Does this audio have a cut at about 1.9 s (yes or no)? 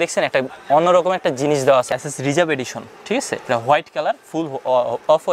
yes